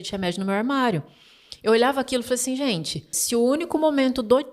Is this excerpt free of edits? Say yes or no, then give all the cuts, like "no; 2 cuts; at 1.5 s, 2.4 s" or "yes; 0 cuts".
no; 1 cut; at 3.2 s